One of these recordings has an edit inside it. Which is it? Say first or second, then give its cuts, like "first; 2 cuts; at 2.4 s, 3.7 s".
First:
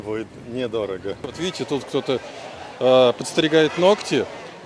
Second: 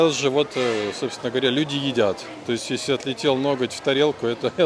first; 1 cut; at 1.4 s